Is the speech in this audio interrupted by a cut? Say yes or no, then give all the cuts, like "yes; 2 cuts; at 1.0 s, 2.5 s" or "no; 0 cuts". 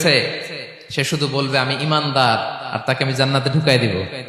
no; 0 cuts